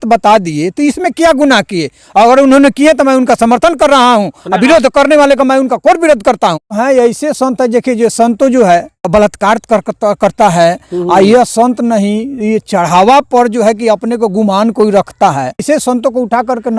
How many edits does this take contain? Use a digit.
3